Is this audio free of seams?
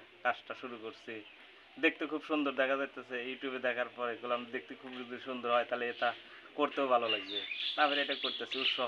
yes; 0 cuts

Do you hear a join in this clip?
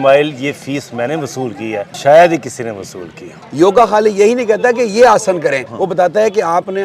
yes; 3 cuts; at 1.9 s, 3.4 s, 5.7 s

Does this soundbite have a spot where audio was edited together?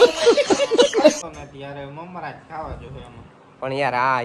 yes; 1 cut; at 1.2 s

